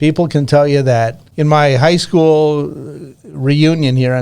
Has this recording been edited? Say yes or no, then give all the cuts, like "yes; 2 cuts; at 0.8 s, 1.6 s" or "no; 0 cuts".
yes; 1 cut; at 1.2 s